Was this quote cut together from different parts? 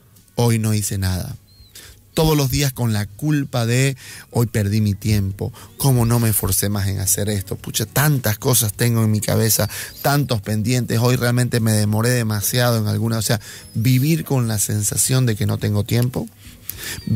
no; 0 cuts

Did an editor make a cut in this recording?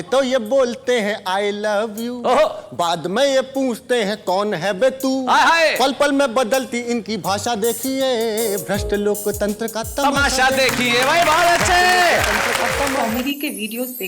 yes; 1 cut; at 13.0 s

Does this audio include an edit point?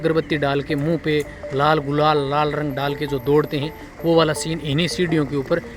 no; 0 cuts

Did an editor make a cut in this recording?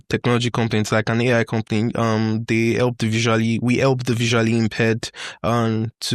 no; 0 cuts

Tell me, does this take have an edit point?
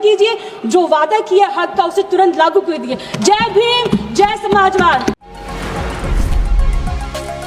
no; 0 cuts

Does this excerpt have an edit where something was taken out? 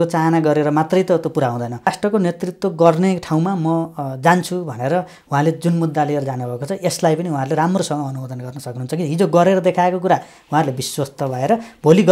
yes; 1 cut; at 1.9 s

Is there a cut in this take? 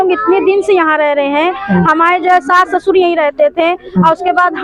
no; 0 cuts

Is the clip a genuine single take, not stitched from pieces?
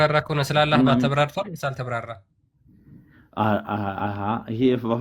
yes; 0 cuts

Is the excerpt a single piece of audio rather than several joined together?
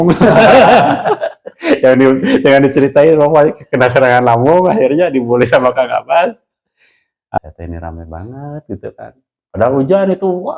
no; 1 cut; at 7.4 s

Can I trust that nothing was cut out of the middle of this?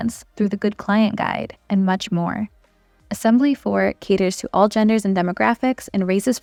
yes; 0 cuts

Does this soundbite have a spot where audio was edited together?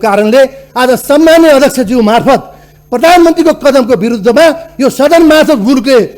no; 0 cuts

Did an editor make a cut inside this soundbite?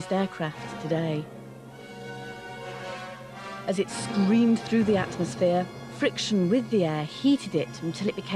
yes; 1 cut; at 2.6 s

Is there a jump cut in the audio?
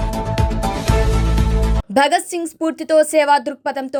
no; 0 cuts

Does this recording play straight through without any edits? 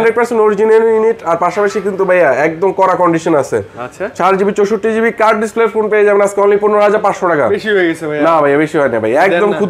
yes; 0 cuts

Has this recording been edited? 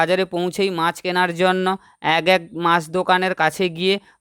no; 0 cuts

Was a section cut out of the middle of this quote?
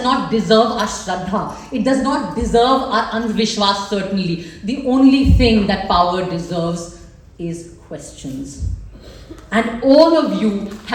no; 0 cuts

